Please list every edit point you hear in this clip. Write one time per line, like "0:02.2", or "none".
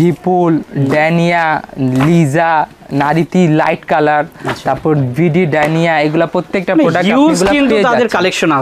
none

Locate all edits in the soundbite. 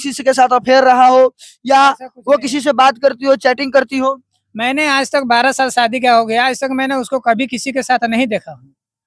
none

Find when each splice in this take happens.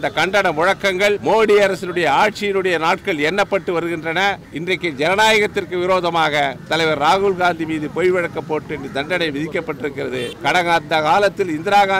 0:01.2
0:04.5
0:10.3

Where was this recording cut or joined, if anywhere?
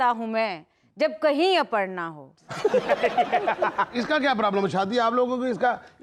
0:03.9

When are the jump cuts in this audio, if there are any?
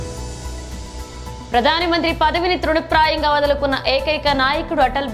0:01.2

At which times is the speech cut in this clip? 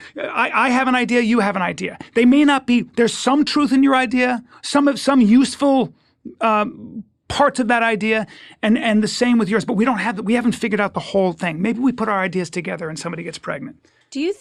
none

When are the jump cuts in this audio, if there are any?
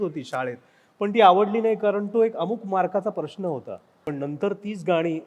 0:04.1

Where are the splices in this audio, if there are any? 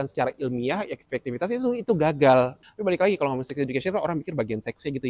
0:02.6

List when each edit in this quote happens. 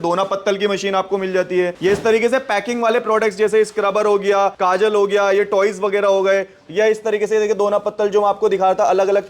0:01.7
0:04.6

